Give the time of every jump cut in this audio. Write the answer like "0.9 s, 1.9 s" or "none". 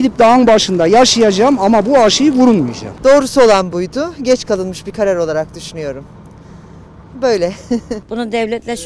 2.8 s, 8.0 s